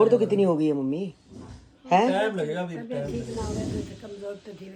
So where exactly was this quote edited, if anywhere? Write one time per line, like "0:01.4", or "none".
none

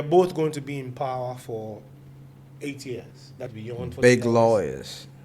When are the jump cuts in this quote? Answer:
0:03.5

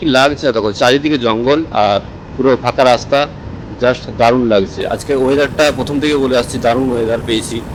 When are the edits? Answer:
none

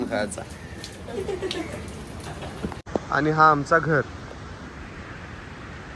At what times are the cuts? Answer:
0:02.8

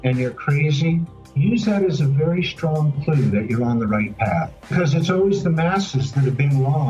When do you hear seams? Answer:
0:04.7

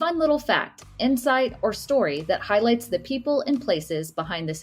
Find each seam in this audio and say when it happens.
none

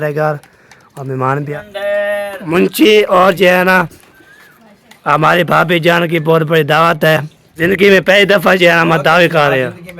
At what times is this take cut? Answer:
0:01.5
0:07.7

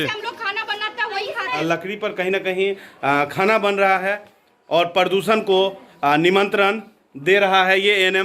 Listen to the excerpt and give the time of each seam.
0:01.6

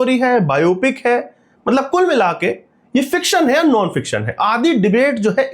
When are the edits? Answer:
none

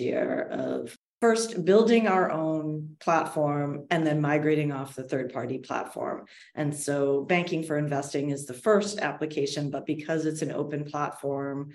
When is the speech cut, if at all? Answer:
0:00.9

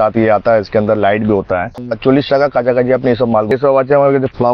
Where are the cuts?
0:01.8
0:03.5

